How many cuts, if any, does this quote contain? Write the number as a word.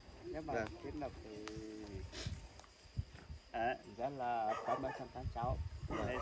zero